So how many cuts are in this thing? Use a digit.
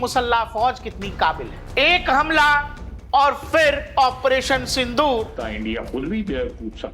2